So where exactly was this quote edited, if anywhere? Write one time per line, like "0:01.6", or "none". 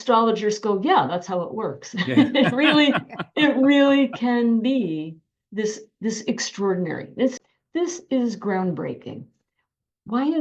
0:07.3